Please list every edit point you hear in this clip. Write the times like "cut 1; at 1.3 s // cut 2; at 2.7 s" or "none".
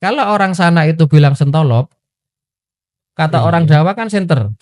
none